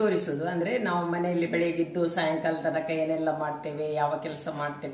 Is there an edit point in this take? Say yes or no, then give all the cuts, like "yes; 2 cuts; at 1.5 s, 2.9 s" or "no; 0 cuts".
no; 0 cuts